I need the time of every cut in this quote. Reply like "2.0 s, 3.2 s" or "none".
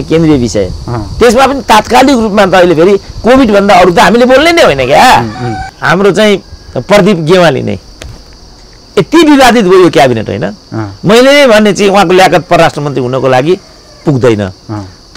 none

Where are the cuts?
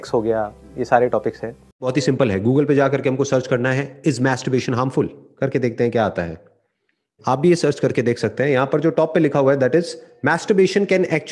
1.9 s

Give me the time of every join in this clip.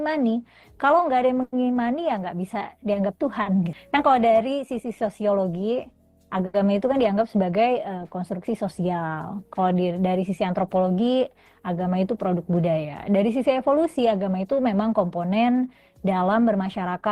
3.8 s

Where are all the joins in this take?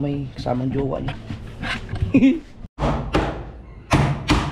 none

